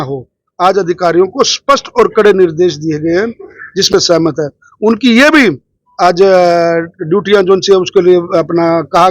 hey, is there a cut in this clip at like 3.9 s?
yes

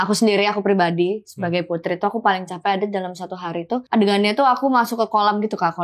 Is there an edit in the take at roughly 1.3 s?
no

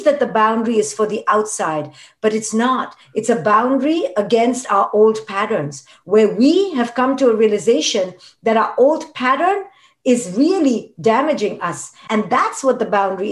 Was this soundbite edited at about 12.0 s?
yes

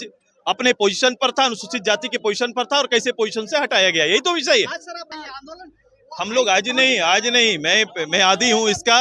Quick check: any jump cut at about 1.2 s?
no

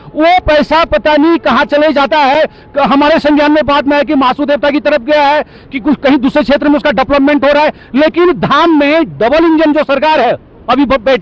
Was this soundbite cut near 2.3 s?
no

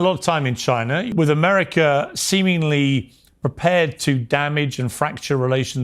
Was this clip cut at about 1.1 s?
yes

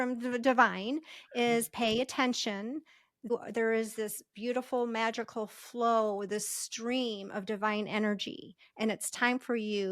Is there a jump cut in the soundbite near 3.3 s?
yes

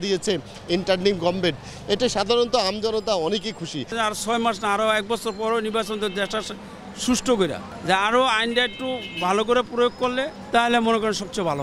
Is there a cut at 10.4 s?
yes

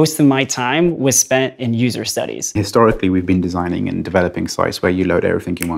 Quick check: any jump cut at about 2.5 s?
yes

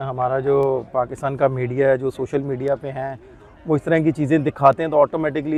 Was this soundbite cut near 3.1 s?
no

